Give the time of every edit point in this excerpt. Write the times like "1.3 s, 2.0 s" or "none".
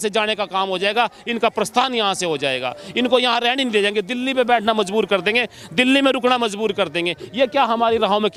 none